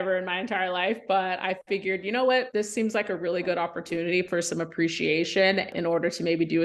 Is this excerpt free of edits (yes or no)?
no